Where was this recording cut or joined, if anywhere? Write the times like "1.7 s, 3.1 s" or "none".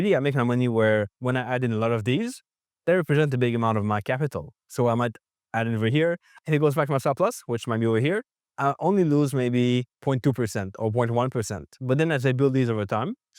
9.9 s

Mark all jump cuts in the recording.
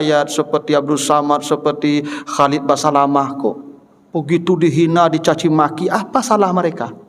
none

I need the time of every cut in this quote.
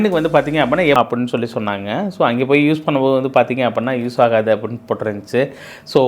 1.0 s

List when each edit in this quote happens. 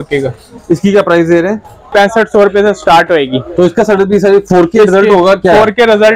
1.9 s

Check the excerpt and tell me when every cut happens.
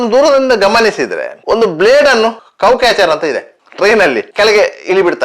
4.2 s

